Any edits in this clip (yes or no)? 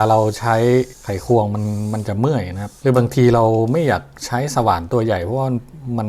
yes